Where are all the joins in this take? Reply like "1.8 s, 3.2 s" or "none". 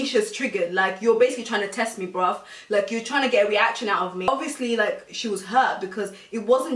4.2 s